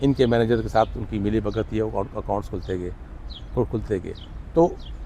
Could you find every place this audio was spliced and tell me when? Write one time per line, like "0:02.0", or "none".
none